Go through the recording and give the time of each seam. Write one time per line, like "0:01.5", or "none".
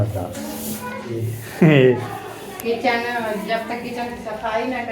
0:01.4